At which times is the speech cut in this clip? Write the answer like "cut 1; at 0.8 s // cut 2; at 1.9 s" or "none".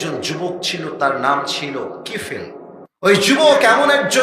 cut 1; at 3.3 s